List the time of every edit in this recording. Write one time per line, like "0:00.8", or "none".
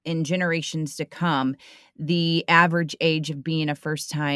none